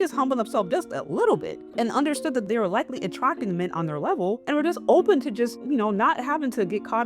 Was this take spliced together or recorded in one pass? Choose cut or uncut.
cut